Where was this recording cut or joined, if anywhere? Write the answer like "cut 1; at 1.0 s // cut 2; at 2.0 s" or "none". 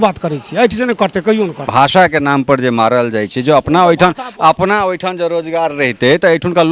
cut 1; at 1.6 s